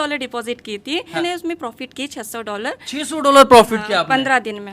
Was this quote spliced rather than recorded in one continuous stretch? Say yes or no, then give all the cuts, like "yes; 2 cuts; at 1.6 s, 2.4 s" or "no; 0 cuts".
yes; 1 cut; at 1.2 s